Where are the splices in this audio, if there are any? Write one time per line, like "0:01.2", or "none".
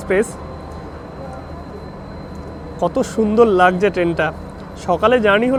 none